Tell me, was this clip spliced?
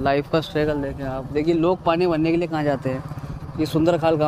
no; 0 cuts

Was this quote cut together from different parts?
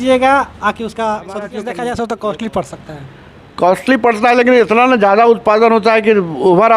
yes; 1 cut; at 1.5 s

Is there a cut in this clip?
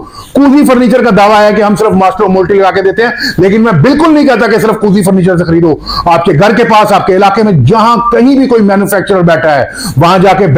no; 0 cuts

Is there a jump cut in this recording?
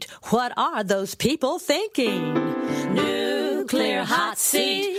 no; 0 cuts

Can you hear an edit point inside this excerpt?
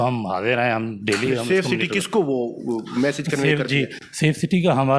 no; 0 cuts

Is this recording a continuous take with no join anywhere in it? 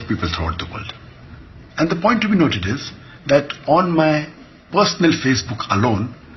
yes; 0 cuts

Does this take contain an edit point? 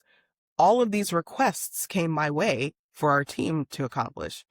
no; 0 cuts

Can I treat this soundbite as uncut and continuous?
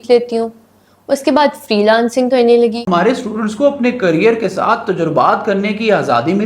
no; 1 cut; at 2.9 s

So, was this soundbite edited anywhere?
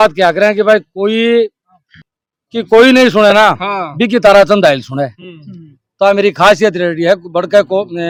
no; 0 cuts

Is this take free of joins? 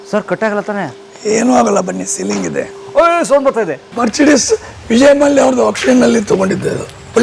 no; 1 cut; at 3.9 s

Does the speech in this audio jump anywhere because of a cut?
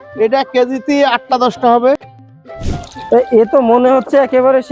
yes; 1 cut; at 2.0 s

